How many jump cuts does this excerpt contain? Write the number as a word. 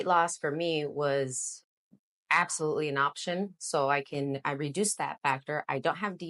zero